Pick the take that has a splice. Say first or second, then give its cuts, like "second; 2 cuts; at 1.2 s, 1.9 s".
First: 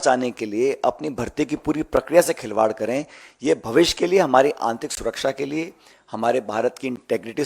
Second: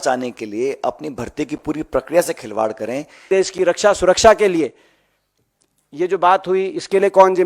second; 1 cut; at 3.3 s